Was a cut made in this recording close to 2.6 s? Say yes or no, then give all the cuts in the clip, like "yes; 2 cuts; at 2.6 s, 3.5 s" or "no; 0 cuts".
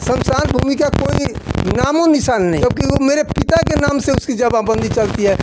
yes; 1 cut; at 2.6 s